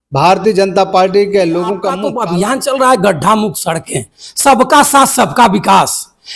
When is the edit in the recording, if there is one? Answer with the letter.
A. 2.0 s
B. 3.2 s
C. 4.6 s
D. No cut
A